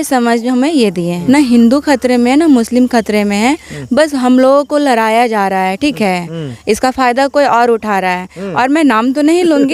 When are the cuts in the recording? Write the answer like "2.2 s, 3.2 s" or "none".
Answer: 1.1 s